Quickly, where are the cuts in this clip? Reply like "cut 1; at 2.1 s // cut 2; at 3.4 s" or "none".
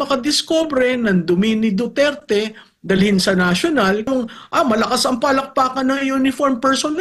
cut 1; at 4.1 s